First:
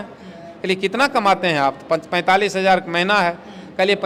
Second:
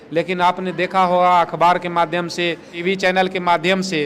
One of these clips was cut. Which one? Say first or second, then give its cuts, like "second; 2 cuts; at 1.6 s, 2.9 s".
second; 1 cut; at 2.7 s